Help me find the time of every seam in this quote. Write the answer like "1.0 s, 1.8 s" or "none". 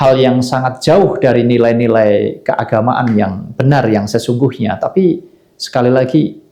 none